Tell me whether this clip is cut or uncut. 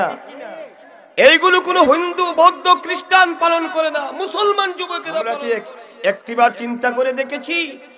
cut